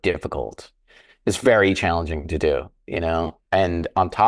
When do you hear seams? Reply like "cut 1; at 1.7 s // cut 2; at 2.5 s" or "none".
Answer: none

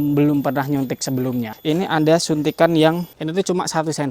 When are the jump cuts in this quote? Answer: cut 1; at 1.5 s // cut 2; at 3.2 s

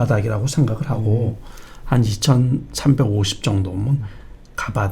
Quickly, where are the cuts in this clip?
none

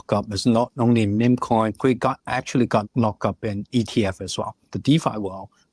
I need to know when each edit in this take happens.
cut 1; at 1.7 s // cut 2; at 2.8 s // cut 3; at 4.7 s

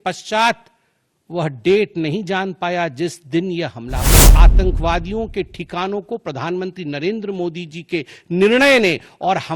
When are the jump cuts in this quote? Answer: cut 1; at 4.3 s

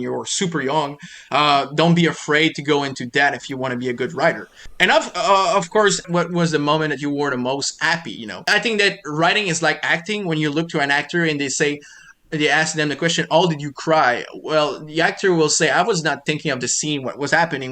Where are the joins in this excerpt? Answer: cut 1; at 4.7 s // cut 2; at 6.1 s // cut 3; at 8.4 s

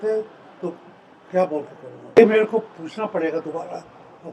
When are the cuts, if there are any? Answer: cut 1; at 2.2 s

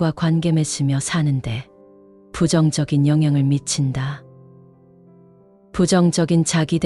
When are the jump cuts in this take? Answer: cut 1; at 4.2 s // cut 2; at 5.7 s

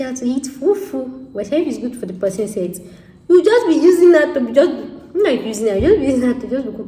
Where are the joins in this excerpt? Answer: none

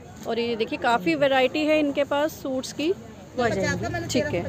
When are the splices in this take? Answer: cut 1; at 3.3 s

